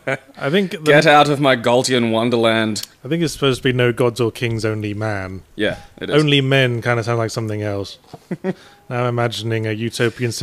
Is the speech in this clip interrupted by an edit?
no; 0 cuts

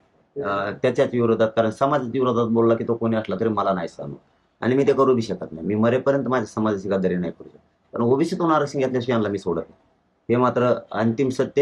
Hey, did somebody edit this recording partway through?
no; 0 cuts

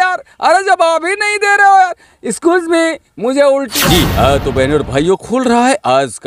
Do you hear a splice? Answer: yes; 1 cut; at 3.7 s

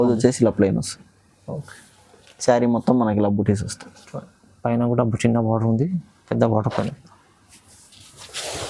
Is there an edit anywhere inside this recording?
no; 0 cuts

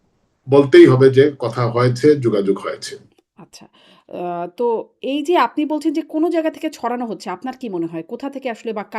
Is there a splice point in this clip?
no; 0 cuts

